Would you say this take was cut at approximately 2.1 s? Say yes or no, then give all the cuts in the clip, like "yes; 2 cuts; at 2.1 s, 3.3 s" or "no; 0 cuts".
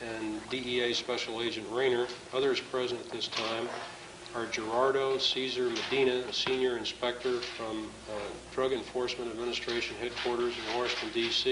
no; 1 cut; at 6.1 s